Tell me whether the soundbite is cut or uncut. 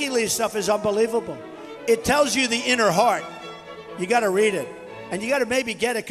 uncut